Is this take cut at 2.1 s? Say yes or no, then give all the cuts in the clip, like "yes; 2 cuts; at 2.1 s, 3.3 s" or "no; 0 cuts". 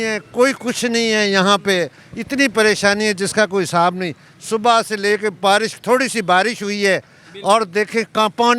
no; 0 cuts